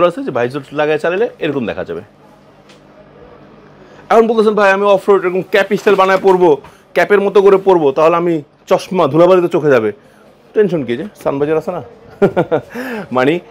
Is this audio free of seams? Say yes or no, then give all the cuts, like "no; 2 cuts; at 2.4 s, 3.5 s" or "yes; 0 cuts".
yes; 0 cuts